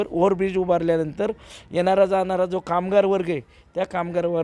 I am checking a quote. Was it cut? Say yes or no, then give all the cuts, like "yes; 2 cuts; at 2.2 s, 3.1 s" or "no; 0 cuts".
no; 0 cuts